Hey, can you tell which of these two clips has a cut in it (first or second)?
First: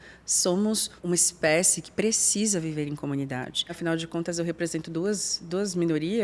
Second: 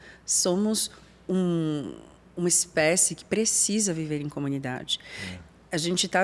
first